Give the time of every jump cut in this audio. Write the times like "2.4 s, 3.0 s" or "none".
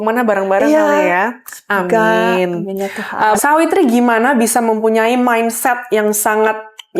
3.4 s